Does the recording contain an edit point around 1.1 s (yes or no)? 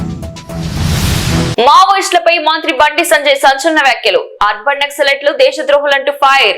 yes